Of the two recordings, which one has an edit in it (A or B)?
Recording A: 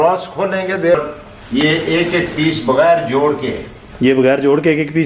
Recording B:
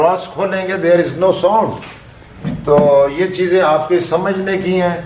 A